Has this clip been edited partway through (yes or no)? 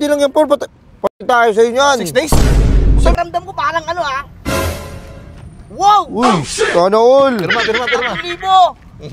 yes